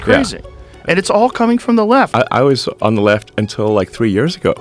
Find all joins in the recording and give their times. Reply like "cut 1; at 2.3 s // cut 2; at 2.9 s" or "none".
cut 1; at 2.1 s